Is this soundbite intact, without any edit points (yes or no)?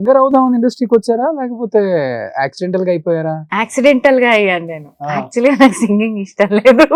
yes